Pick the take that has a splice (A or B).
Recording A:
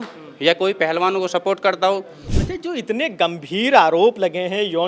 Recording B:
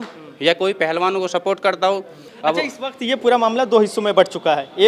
A